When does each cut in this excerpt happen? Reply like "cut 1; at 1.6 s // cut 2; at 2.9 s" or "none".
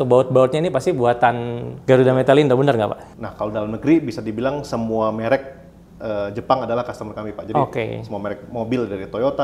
cut 1; at 3.0 s